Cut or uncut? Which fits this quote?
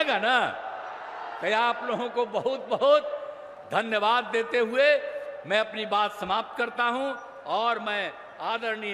uncut